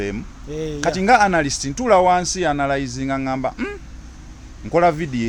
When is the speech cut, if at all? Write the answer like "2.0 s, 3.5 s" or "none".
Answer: none